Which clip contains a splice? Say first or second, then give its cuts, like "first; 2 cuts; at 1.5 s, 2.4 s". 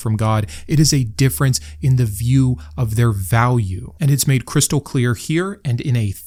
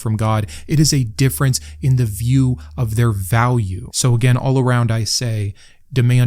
second; 1 cut; at 3.8 s